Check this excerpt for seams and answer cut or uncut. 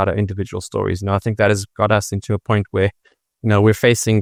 uncut